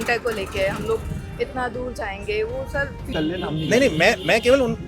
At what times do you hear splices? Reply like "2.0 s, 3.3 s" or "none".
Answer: 3.1 s